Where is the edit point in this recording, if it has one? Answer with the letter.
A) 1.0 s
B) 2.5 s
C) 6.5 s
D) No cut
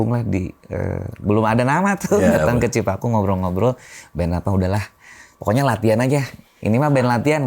D